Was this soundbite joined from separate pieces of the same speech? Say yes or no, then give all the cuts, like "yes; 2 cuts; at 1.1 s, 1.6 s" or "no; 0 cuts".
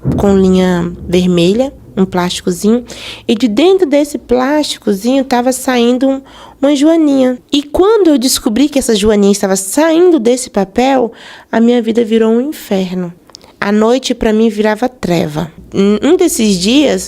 yes; 2 cuts; at 7.4 s, 15.5 s